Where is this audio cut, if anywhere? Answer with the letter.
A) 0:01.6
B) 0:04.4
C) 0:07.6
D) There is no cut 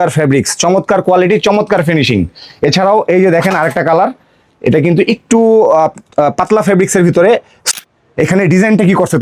C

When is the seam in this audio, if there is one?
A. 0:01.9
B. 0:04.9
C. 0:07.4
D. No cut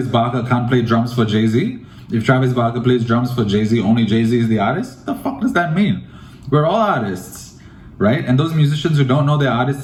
D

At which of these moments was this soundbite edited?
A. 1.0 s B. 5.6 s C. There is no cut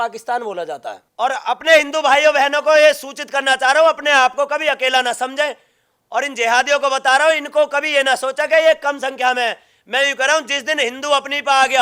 A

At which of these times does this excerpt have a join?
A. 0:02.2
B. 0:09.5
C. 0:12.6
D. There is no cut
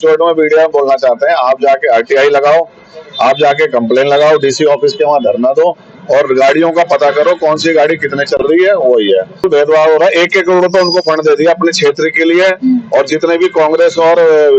B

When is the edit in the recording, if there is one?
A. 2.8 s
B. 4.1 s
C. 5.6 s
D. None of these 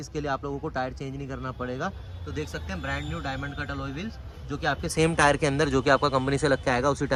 D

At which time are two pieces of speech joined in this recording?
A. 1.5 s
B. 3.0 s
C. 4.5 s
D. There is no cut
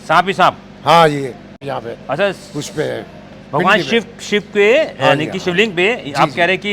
A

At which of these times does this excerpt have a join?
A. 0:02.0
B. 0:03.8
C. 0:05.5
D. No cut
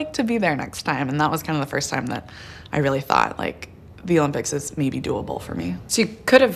B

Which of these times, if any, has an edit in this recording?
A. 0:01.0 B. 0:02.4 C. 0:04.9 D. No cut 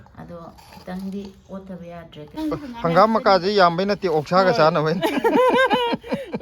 B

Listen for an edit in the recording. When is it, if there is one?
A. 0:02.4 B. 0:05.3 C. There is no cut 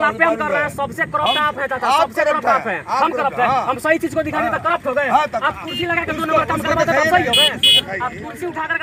C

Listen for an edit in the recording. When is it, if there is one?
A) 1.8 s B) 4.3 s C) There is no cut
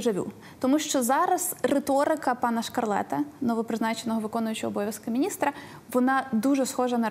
C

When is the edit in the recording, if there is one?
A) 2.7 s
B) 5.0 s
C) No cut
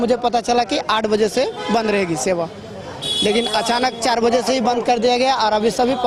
C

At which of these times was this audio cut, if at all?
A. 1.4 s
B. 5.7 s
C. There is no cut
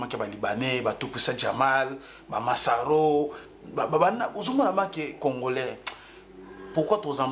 C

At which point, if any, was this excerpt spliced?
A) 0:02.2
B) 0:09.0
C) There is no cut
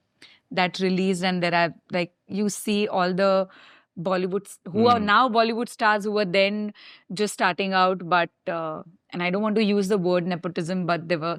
C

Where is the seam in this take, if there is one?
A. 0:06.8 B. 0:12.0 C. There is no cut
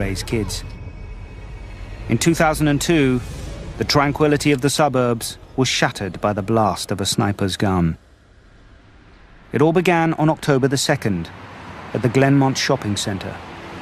A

